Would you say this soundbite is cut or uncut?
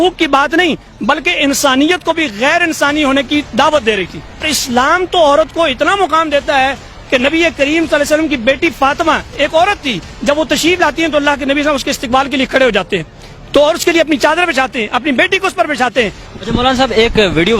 cut